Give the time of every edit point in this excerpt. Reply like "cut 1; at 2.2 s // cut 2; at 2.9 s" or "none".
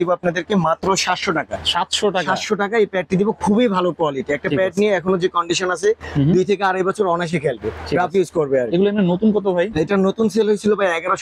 none